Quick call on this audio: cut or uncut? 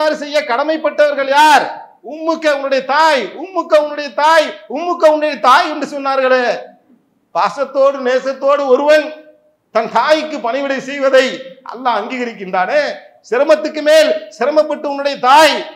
uncut